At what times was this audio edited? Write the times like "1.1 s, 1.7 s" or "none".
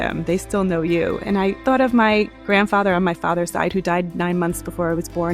1.6 s

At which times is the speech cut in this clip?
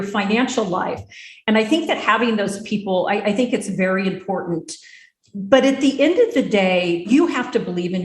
7.0 s

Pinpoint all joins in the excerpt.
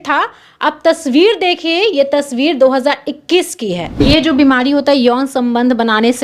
4.0 s

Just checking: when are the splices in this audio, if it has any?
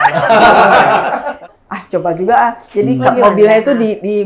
1.4 s

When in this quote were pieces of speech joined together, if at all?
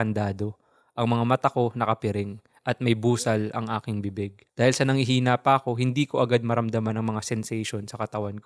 4.4 s

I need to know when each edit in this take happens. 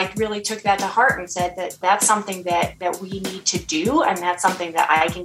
1.8 s

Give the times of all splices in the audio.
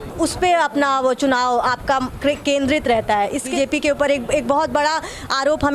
3.5 s

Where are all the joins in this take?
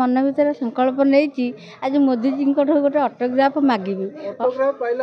none

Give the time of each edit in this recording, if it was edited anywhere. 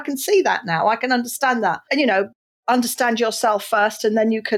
1.9 s

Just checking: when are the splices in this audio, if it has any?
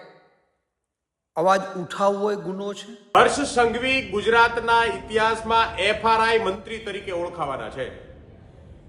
3.1 s

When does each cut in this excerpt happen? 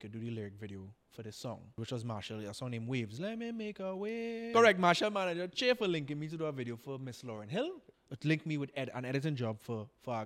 1.8 s, 4.4 s, 7.9 s

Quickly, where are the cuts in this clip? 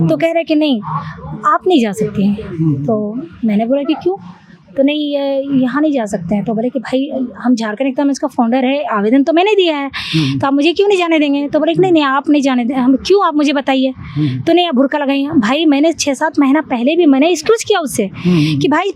none

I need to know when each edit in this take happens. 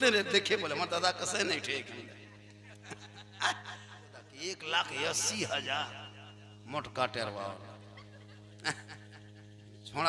4.3 s

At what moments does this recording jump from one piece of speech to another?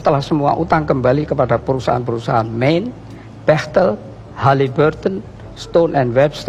none

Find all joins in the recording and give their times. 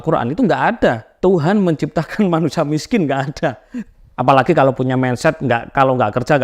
1.1 s, 3.7 s

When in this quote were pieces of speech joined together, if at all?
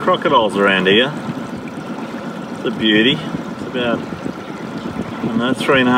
none

